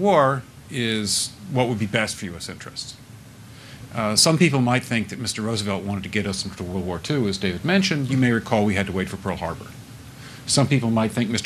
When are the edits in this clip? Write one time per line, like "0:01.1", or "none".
0:03.3
0:07.3

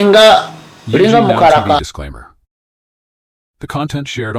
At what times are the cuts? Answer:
0:01.8

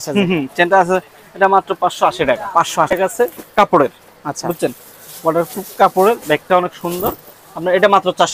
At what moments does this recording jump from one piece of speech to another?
0:02.9

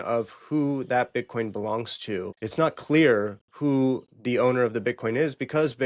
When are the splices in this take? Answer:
0:02.4

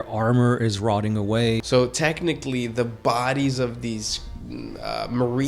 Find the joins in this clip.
0:01.6

